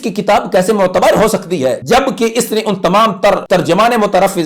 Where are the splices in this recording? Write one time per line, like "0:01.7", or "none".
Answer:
0:01.8
0:03.4